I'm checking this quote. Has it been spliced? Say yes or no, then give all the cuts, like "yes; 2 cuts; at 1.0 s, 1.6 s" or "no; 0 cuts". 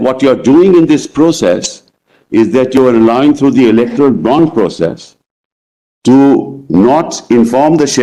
no; 0 cuts